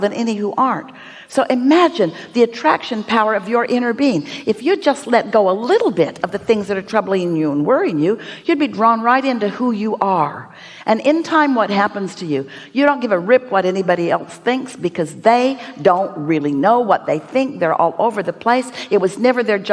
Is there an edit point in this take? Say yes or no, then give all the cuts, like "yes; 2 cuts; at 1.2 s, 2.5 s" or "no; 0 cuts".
no; 0 cuts